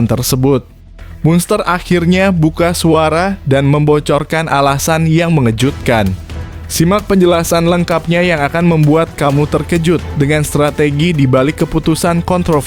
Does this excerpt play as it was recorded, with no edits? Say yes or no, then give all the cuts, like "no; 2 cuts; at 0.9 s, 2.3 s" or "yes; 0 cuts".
yes; 0 cuts